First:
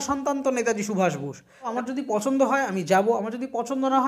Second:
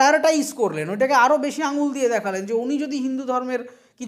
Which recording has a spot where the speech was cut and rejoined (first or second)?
first